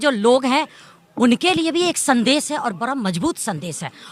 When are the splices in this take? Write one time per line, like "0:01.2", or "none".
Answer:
none